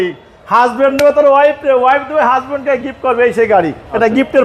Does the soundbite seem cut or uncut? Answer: uncut